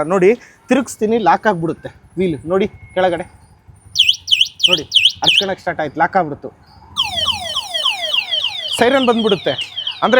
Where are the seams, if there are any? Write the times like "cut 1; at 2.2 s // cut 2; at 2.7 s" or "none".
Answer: none

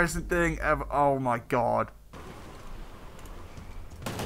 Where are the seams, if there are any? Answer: cut 1; at 2.2 s

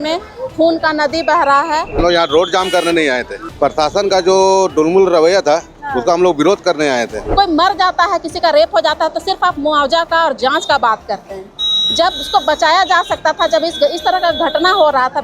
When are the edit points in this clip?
cut 1; at 2.0 s // cut 2; at 7.2 s

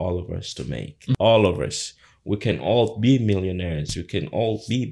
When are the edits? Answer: cut 1; at 1.2 s

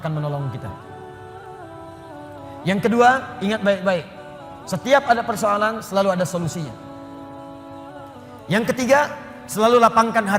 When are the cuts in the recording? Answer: cut 1; at 0.9 s // cut 2; at 2.6 s

